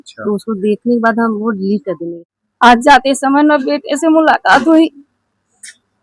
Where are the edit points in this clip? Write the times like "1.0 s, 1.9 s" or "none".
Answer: 2.0 s